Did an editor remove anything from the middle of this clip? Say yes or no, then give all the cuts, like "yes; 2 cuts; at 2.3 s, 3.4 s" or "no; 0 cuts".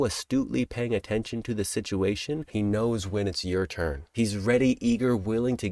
yes; 2 cuts; at 2.5 s, 4.1 s